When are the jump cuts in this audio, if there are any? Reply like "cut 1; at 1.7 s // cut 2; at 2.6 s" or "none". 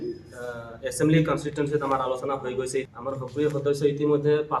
cut 1; at 2.9 s